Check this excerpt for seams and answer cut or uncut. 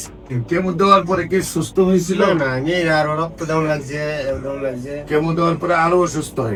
uncut